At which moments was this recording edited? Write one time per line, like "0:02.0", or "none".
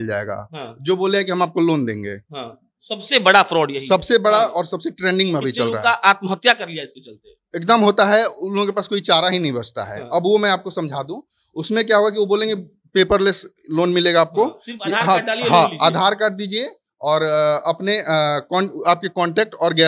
none